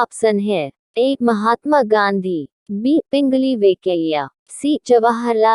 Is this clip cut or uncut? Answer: uncut